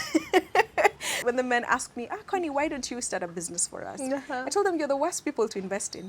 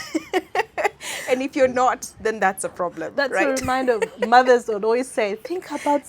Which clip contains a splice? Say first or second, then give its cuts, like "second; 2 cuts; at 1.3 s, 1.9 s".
first; 1 cut; at 1.1 s